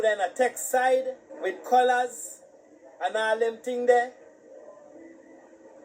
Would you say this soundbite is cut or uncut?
cut